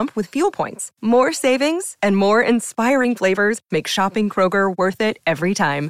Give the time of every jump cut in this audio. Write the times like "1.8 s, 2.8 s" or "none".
none